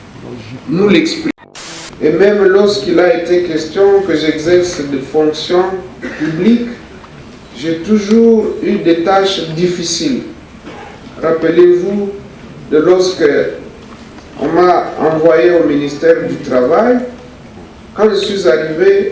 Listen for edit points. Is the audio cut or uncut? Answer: cut